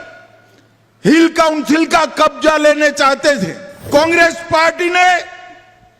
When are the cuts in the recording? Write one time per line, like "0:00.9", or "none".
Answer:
0:03.9